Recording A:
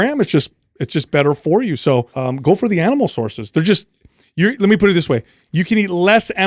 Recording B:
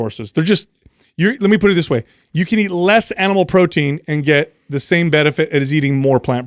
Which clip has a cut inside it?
A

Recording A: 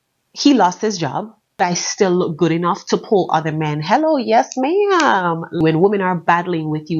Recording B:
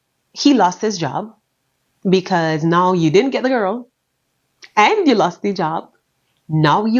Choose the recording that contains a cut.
A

